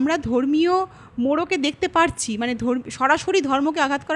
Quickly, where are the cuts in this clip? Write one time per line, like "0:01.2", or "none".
none